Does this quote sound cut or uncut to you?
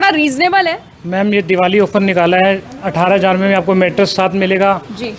uncut